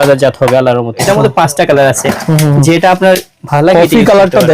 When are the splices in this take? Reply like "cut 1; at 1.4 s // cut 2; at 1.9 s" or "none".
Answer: cut 1; at 1.1 s